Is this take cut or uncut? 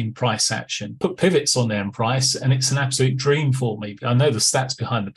cut